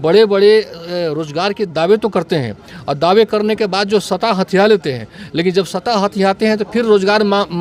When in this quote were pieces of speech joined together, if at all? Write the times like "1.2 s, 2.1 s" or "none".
none